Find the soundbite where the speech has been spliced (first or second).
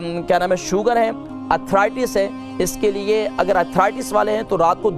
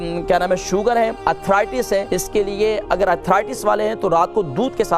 second